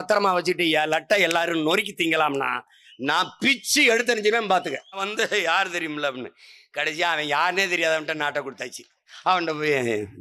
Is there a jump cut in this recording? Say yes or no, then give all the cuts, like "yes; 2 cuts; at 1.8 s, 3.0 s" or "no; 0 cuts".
yes; 2 cuts; at 5.1 s, 9.1 s